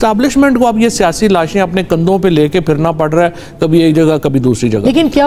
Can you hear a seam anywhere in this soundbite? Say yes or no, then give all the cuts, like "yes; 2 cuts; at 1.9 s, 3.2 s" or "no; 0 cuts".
no; 0 cuts